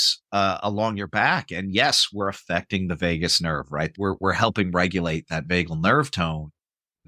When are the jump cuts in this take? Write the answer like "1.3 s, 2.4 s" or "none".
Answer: 3.9 s